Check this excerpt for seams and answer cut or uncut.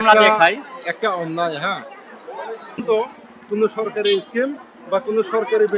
cut